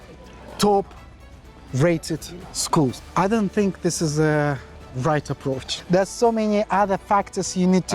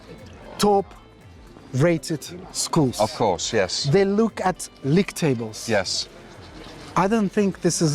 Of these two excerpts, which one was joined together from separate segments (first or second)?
first